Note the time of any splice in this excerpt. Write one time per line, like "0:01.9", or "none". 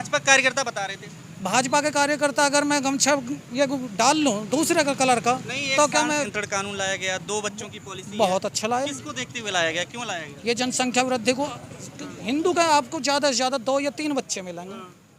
0:06.3